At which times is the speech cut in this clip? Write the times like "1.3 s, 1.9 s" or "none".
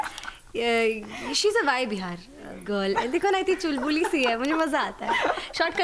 2.6 s